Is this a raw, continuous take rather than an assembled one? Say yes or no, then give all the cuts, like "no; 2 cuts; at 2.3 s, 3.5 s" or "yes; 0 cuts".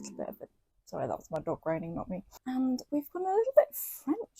no; 1 cut; at 2.3 s